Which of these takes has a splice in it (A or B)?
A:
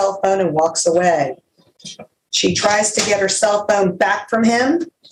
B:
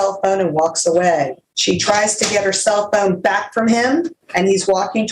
B